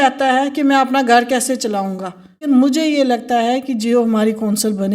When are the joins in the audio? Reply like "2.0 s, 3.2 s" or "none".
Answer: 2.4 s